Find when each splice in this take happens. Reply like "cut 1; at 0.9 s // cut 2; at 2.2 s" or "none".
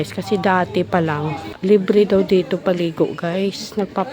cut 1; at 1.5 s

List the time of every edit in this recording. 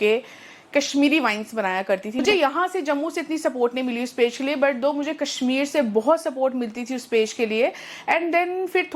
cut 1; at 2.2 s

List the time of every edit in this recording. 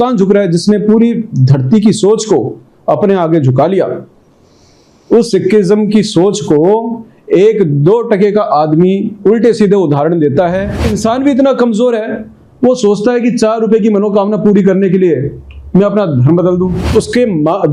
cut 1; at 10.9 s // cut 2; at 16.9 s

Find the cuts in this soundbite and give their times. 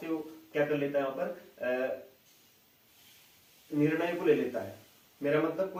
none

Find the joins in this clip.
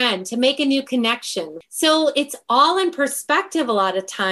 cut 1; at 1.5 s

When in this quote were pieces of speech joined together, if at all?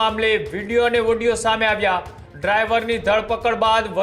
none

